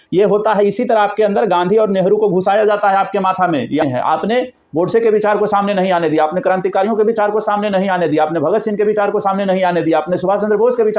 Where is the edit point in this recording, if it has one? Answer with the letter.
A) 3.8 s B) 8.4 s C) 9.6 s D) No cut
A